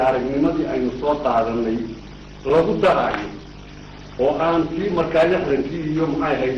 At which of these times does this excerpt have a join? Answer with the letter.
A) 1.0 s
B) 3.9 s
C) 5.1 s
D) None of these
D